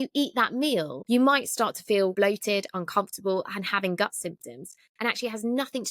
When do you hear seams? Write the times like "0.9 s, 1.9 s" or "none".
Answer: 0.9 s, 2.1 s